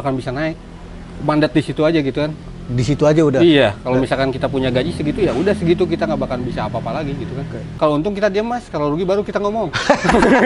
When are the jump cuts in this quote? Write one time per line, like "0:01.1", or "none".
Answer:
0:07.7